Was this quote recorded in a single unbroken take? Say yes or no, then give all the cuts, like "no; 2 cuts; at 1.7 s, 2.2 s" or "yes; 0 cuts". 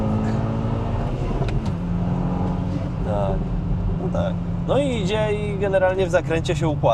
yes; 0 cuts